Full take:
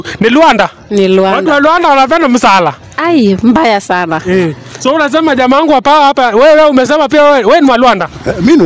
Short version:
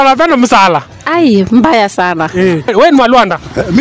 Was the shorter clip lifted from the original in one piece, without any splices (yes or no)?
no